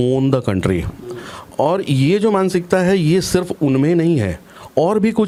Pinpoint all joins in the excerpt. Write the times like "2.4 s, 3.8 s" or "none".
none